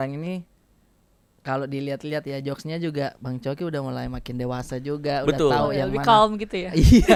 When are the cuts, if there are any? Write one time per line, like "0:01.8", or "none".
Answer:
none